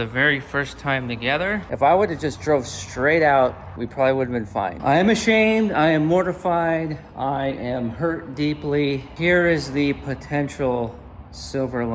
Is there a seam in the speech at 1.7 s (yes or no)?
yes